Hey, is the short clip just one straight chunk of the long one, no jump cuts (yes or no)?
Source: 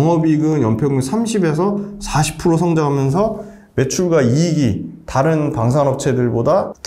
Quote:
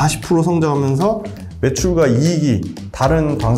yes